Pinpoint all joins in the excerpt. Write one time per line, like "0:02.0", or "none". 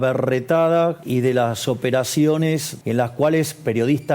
0:01.0
0:02.7